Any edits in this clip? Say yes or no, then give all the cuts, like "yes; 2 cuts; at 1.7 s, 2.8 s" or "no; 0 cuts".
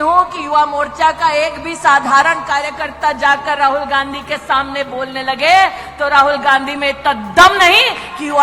no; 0 cuts